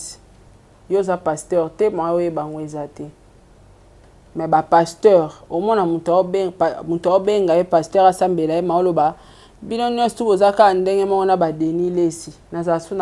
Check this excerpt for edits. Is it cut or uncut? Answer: uncut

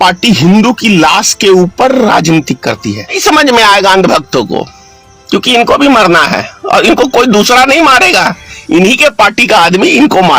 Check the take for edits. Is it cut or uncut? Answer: cut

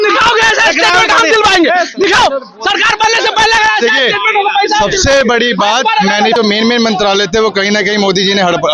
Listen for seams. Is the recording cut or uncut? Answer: cut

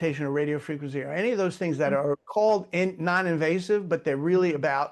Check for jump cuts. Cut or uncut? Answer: uncut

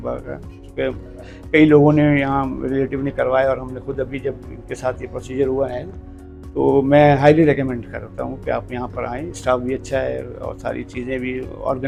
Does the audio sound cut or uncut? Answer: uncut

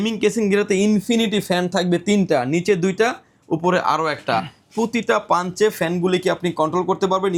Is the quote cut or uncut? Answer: uncut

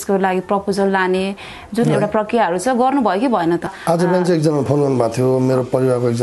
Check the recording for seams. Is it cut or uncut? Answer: cut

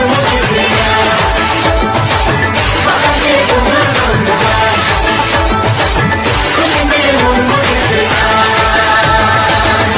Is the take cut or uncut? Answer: uncut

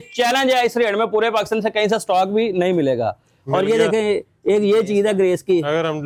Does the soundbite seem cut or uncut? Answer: uncut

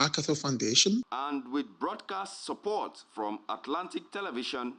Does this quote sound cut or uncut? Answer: cut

